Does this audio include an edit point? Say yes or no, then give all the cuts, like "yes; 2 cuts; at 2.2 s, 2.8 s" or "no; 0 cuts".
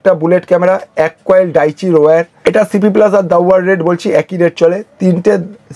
no; 0 cuts